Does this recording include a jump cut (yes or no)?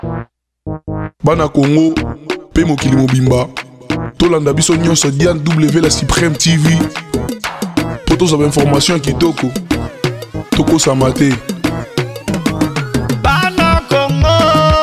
no